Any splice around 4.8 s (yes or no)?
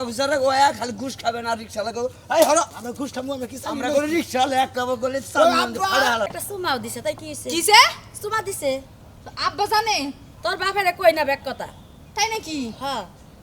no